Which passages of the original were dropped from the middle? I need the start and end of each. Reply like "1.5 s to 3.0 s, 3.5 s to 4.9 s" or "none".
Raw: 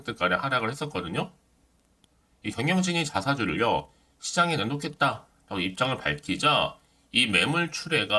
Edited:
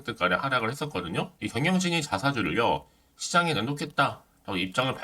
1.3 s to 2.4 s